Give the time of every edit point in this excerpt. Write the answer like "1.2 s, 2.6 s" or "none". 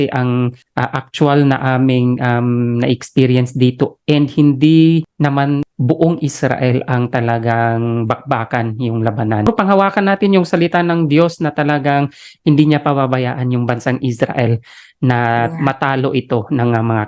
9.5 s